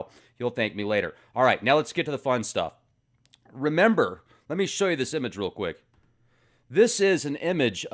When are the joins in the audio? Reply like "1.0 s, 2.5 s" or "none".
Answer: 6.0 s